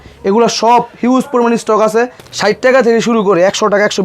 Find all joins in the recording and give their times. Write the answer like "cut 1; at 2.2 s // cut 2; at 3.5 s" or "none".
cut 1; at 2.2 s